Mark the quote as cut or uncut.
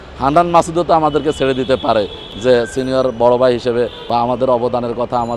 cut